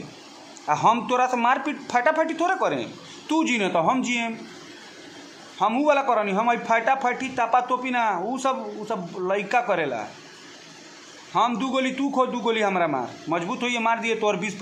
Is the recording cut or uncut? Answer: uncut